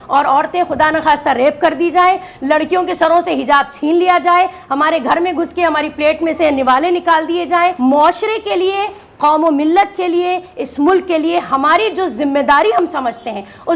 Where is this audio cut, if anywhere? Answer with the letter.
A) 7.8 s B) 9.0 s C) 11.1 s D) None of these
A